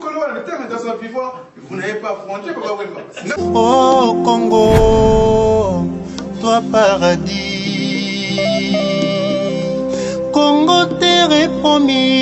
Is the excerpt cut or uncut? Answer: cut